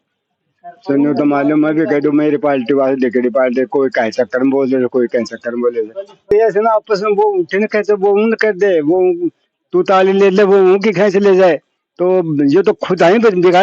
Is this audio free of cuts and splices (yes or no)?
no